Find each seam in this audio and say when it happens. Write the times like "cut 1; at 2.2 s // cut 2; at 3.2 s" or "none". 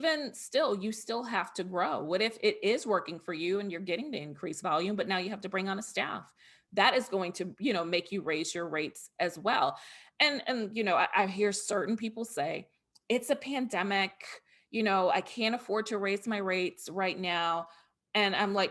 none